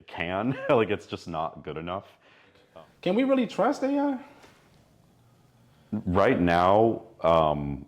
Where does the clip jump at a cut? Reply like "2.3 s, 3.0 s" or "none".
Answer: 2.6 s